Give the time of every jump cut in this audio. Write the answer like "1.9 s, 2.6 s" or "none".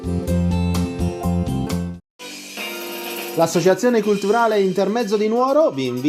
1.8 s